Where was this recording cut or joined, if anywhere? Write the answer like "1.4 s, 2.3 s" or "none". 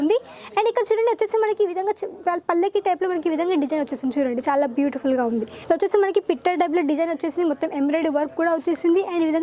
5.5 s